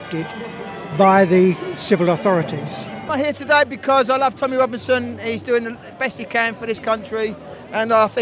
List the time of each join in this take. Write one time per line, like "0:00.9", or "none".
0:03.0